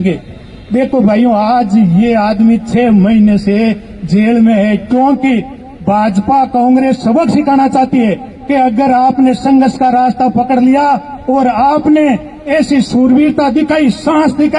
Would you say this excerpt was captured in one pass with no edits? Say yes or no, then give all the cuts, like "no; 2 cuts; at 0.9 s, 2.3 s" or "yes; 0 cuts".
yes; 0 cuts